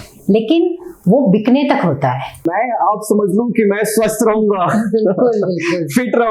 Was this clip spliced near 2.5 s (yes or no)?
yes